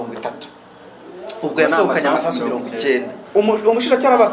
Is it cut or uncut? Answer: cut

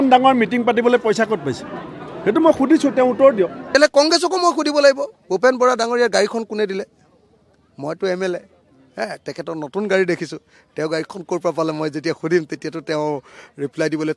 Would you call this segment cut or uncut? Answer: cut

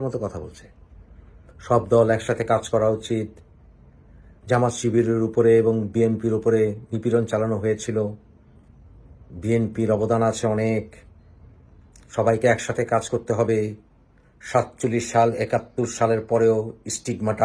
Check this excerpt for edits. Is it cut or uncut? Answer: uncut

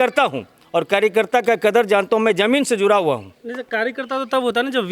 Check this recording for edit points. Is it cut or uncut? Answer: uncut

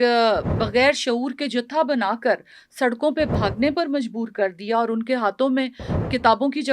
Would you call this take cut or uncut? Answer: uncut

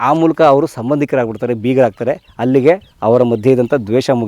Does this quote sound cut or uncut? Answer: cut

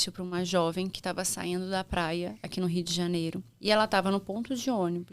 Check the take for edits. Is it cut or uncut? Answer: cut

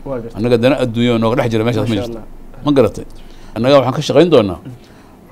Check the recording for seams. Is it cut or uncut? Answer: cut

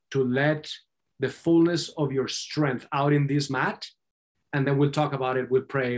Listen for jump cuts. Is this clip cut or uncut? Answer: uncut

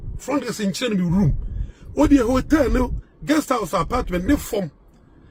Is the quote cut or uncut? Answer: uncut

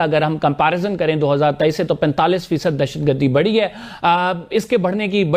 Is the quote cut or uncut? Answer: uncut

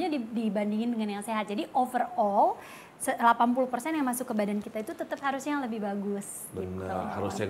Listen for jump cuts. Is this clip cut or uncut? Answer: uncut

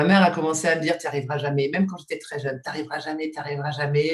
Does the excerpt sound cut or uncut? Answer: uncut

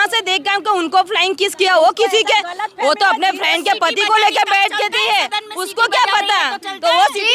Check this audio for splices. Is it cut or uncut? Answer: uncut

